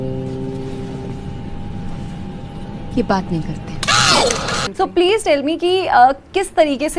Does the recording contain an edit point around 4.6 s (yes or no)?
yes